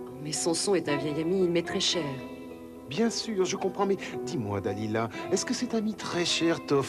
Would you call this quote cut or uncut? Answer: cut